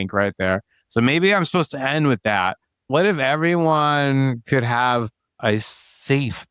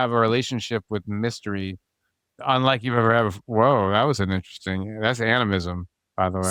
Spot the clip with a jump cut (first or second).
first